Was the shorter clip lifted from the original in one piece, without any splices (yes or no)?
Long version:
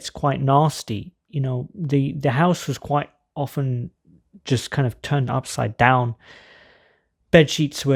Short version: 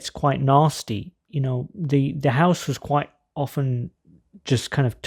yes